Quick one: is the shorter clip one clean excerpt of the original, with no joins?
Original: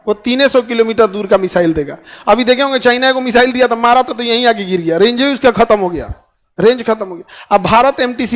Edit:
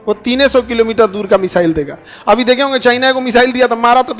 yes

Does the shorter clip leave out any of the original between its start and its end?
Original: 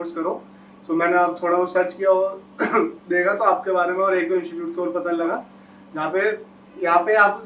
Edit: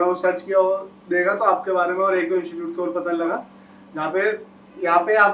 yes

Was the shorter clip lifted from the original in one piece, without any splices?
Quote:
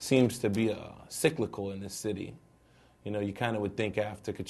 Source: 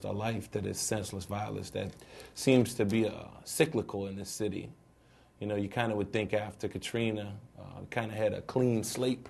yes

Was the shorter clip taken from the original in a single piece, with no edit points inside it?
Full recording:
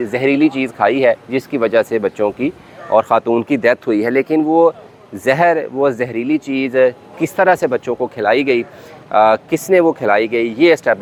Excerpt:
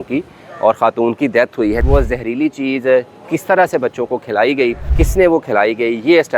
no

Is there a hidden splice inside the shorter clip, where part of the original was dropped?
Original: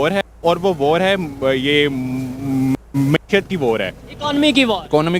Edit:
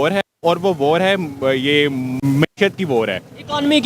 yes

